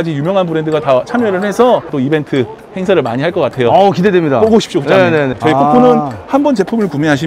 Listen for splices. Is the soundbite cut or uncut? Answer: cut